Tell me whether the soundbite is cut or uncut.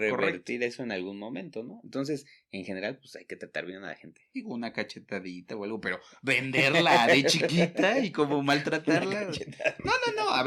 uncut